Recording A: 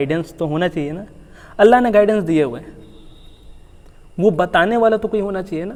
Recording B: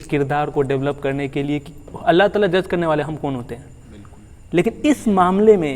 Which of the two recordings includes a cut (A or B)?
B